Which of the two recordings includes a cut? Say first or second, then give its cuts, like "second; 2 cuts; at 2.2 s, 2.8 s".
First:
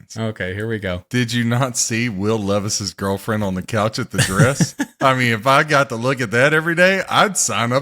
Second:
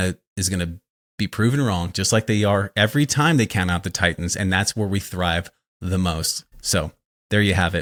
first; 1 cut; at 1.0 s